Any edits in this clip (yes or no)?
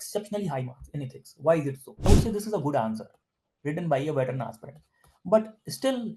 yes